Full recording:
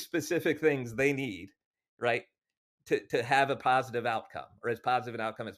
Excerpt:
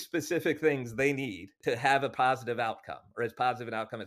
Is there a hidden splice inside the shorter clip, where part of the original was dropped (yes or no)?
yes